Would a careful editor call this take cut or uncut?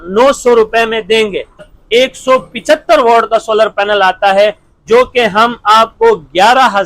cut